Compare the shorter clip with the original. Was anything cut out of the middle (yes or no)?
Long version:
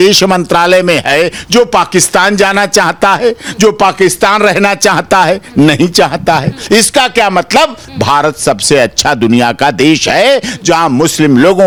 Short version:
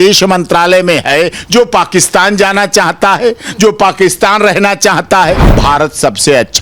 yes